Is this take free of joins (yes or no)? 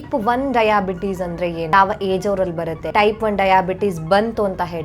no